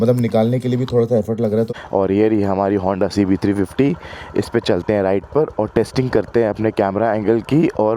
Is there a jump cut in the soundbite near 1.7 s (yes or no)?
yes